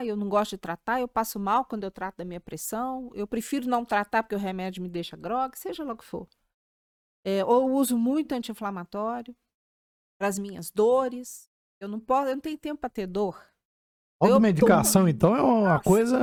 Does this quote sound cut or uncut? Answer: uncut